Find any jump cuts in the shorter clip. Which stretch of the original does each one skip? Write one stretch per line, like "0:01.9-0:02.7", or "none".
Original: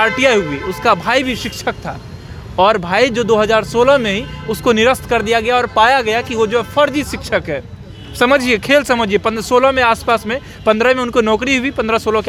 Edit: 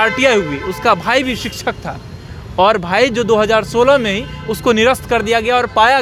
none